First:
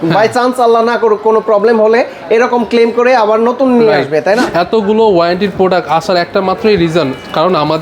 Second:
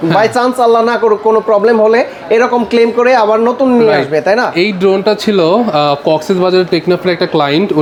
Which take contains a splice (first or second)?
first